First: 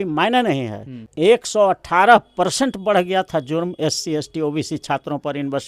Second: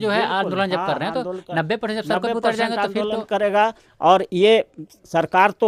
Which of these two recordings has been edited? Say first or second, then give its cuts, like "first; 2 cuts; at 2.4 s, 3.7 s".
first; 1 cut; at 1.1 s